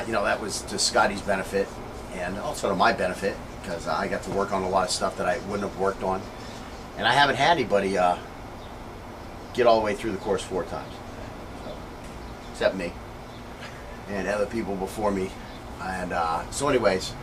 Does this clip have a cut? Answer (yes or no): yes